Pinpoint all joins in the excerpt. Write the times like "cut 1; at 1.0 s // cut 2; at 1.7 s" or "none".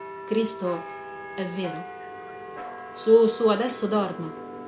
none